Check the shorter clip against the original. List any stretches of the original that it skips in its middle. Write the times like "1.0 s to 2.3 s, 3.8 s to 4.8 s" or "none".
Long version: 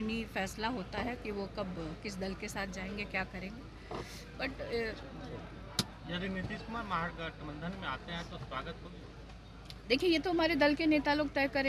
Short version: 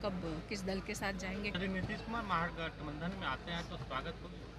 3.1 s to 6.2 s